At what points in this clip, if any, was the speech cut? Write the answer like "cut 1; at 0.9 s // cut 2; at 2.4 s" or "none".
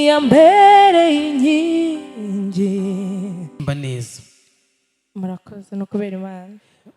cut 1; at 3.7 s